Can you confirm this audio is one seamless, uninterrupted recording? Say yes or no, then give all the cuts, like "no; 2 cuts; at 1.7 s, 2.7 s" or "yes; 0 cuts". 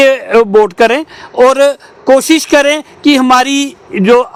yes; 0 cuts